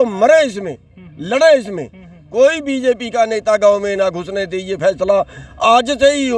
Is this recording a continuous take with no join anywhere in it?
yes; 0 cuts

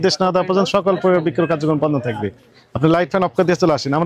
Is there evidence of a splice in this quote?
no; 0 cuts

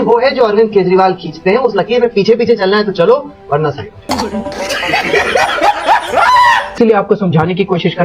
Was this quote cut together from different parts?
yes; 2 cuts; at 4.0 s, 6.7 s

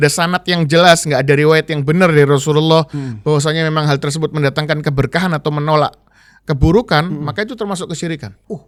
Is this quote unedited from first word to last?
yes; 0 cuts

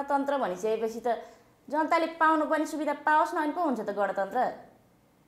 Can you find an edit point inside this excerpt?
no; 0 cuts

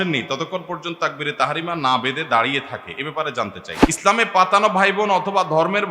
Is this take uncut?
no; 1 cut; at 3.7 s

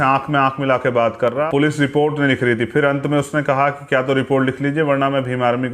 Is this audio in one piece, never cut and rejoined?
no; 1 cut; at 1.5 s

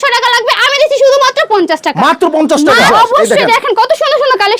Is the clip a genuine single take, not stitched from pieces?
no; 1 cut; at 2.9 s

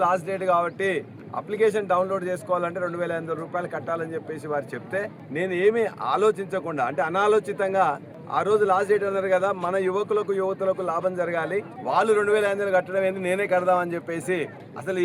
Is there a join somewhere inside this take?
no; 0 cuts

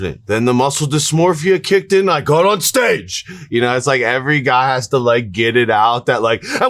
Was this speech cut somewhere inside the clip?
no; 0 cuts

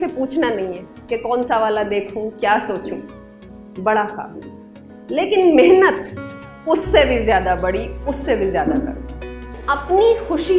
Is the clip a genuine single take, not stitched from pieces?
no; 1 cut; at 9.6 s

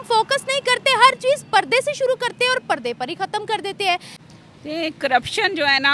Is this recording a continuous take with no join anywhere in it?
no; 1 cut; at 4.0 s

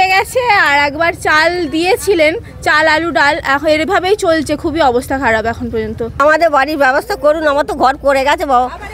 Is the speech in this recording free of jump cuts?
no; 1 cut; at 6.2 s

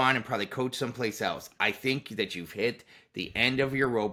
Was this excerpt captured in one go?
yes; 0 cuts

